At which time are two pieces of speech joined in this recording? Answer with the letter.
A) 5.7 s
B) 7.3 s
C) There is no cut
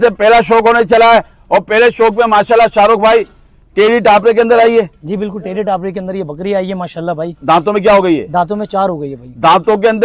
C